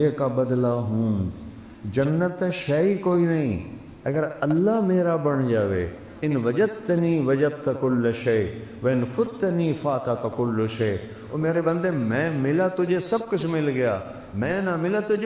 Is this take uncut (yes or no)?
yes